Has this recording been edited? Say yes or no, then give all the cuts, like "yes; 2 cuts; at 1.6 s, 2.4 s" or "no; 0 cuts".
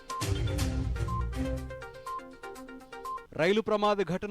no; 0 cuts